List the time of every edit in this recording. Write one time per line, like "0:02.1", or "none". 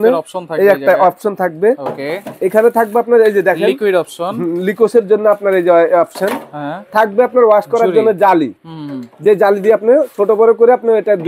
none